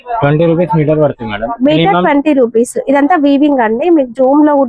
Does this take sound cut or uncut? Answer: uncut